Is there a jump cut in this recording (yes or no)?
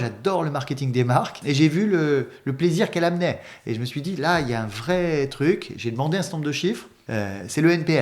yes